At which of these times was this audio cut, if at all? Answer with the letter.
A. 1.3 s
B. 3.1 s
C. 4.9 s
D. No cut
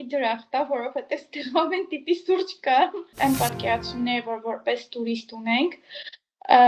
B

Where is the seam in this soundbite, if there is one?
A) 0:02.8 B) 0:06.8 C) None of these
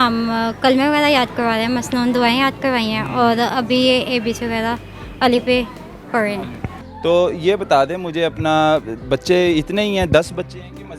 C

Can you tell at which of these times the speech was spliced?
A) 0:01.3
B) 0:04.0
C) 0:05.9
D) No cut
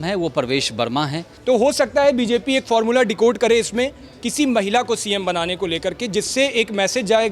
A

